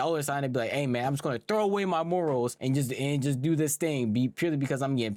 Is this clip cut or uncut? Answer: uncut